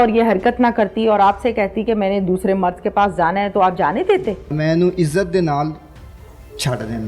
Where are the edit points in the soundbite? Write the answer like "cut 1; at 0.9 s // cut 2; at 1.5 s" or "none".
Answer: cut 1; at 4.5 s